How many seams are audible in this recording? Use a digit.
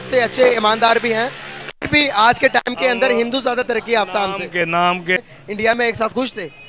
1